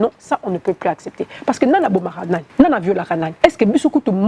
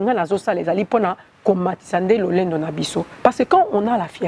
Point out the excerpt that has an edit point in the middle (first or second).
first